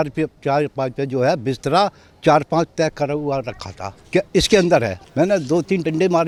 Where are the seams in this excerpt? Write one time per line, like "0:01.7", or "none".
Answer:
none